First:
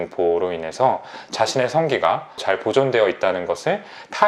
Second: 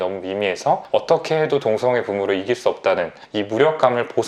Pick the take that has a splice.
first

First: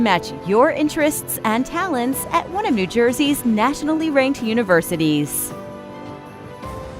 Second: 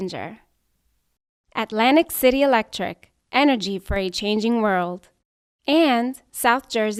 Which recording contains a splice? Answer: first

